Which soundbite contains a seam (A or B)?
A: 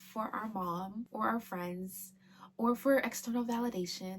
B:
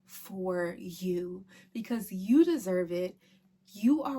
A